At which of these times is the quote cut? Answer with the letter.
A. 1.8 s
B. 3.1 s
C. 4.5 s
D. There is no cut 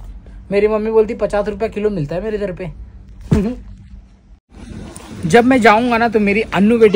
C